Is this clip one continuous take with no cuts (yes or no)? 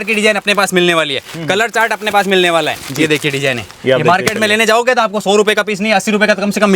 yes